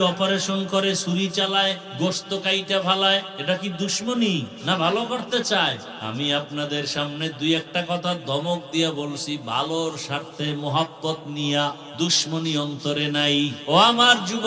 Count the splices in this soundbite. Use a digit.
6